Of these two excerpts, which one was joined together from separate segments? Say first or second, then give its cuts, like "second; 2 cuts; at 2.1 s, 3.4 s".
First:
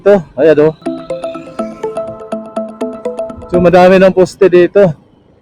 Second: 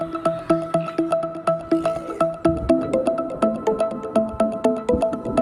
first; 2 cuts; at 0.8 s, 3.4 s